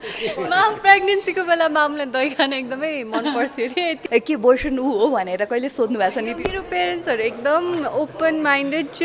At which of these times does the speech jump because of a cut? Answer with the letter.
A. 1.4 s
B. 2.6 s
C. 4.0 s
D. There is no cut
C